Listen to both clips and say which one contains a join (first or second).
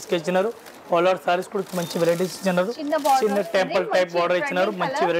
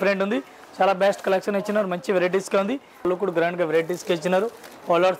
second